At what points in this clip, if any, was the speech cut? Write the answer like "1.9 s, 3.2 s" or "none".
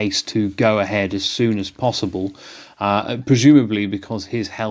none